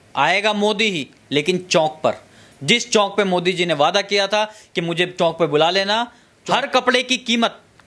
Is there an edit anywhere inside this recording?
yes; 1 cut; at 6.2 s

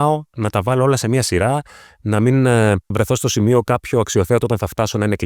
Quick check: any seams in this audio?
no; 0 cuts

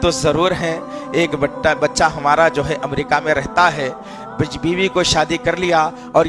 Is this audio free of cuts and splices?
yes; 0 cuts

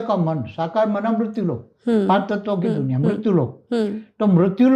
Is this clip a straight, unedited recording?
yes; 0 cuts

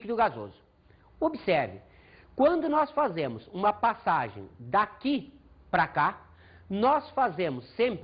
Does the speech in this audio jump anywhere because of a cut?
no; 0 cuts

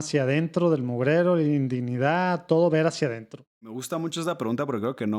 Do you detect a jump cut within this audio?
yes; 1 cut; at 3.7 s

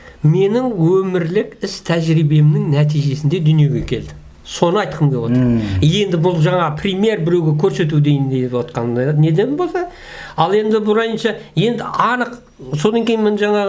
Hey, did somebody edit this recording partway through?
no; 0 cuts

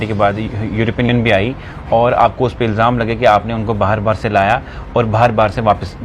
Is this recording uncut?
no; 1 cut; at 1.1 s

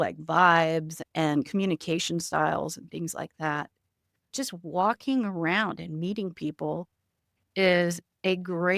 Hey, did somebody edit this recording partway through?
yes; 2 cuts; at 1.0 s, 4.3 s

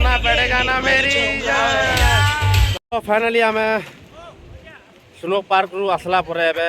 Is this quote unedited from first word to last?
no; 1 cut; at 2.6 s

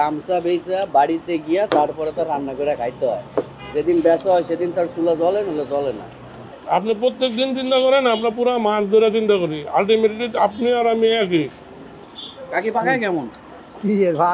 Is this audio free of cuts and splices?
yes; 0 cuts

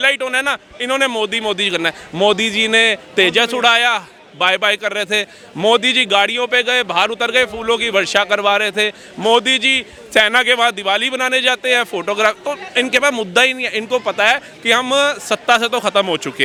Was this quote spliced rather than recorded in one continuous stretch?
no; 0 cuts

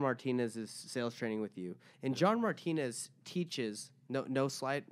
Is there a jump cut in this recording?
no; 0 cuts

